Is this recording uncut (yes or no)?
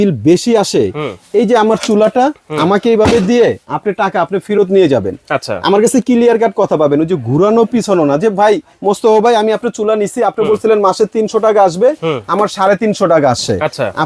yes